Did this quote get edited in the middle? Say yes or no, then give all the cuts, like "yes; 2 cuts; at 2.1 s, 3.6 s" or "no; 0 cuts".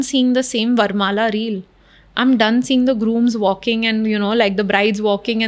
no; 0 cuts